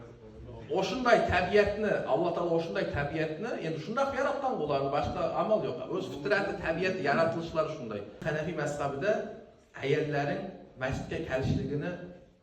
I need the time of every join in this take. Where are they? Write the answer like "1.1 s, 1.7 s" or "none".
8.2 s